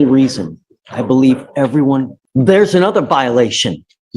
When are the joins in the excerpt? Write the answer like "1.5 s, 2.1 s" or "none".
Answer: 2.2 s